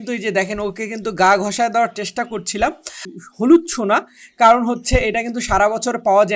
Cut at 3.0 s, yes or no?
yes